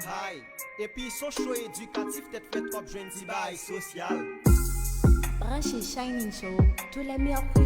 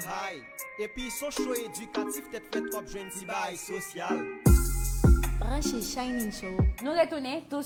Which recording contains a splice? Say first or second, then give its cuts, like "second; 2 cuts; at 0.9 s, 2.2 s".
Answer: first; 1 cut; at 6.4 s